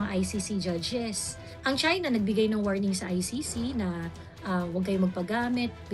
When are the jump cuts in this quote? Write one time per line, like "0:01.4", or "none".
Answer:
0:01.5